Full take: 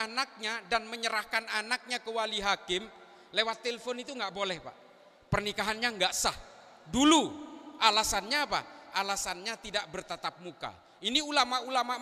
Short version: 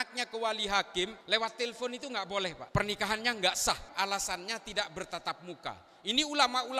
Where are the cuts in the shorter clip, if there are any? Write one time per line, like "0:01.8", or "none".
0:01.2
0:02.6
0:03.9